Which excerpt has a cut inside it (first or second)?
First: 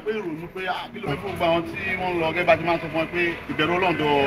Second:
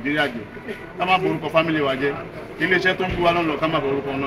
first